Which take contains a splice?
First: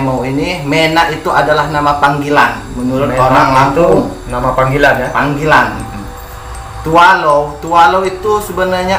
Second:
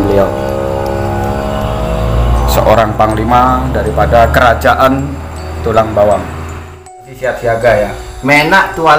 second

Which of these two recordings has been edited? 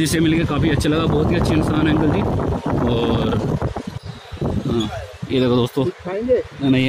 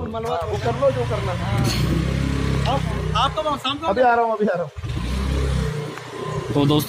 first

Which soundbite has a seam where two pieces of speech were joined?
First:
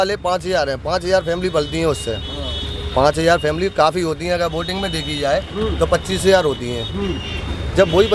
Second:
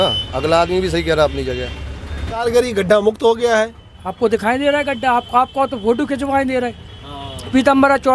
second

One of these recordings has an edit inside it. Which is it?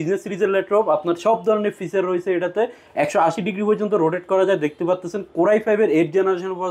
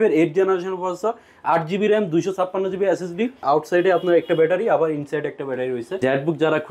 second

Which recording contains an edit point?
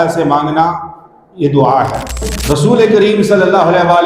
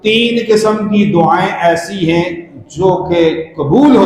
first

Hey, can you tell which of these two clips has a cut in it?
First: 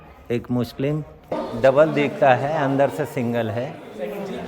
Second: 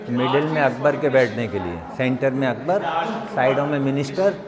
first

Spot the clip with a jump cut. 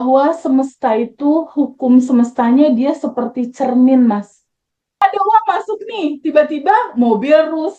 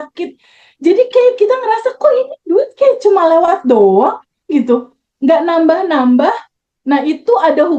first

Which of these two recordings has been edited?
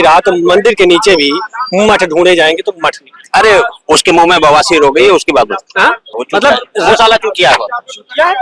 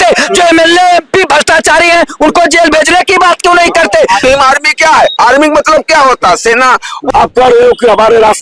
second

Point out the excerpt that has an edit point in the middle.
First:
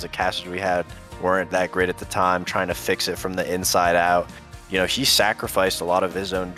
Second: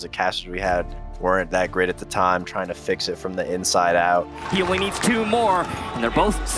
second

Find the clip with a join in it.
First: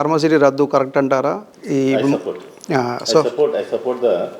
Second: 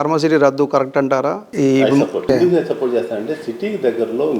second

